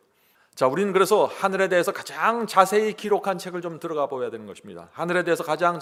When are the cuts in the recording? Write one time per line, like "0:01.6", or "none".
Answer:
none